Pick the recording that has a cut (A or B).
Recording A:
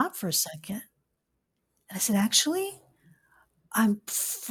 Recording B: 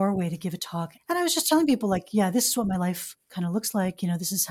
B